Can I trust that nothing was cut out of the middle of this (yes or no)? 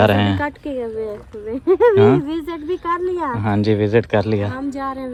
yes